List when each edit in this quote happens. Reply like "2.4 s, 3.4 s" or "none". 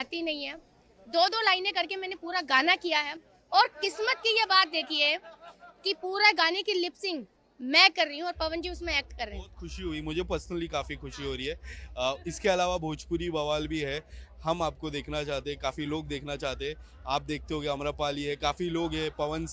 none